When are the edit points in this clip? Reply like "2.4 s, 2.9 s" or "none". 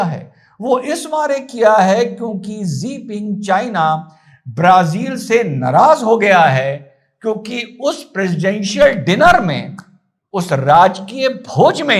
none